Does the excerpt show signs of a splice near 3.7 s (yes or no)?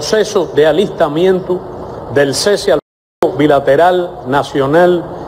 no